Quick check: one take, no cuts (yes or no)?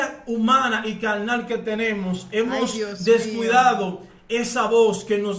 yes